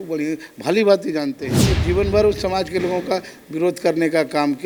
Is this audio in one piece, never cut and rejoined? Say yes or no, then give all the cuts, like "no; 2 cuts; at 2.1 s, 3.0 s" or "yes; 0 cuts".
yes; 0 cuts